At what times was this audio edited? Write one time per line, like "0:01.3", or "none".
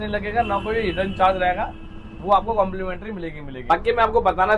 none